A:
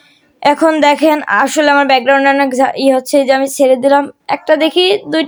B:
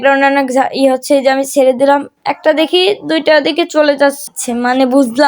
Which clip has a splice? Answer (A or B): B